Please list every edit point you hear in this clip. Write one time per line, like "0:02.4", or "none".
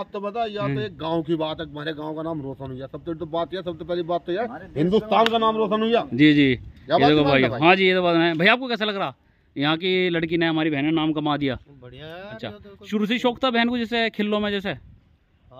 none